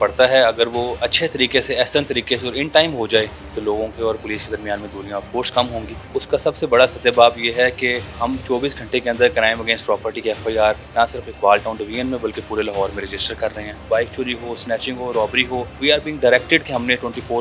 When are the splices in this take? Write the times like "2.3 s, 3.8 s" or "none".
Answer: 3.4 s, 6.0 s, 8.1 s, 10.8 s, 13.8 s, 15.7 s